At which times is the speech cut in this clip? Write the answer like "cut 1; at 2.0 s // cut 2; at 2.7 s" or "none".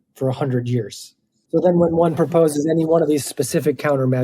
cut 1; at 1.4 s